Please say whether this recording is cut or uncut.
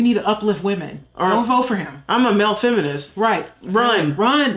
uncut